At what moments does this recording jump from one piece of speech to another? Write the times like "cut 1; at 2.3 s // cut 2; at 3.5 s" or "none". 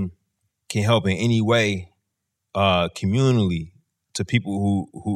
none